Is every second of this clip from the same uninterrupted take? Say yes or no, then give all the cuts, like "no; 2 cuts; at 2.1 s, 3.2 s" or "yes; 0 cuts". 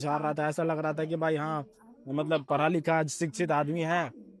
yes; 0 cuts